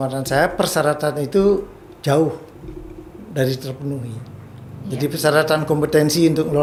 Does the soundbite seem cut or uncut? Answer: uncut